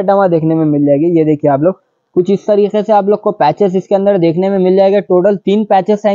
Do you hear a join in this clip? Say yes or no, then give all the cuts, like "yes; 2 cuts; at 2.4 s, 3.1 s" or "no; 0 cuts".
yes; 1 cut; at 2.0 s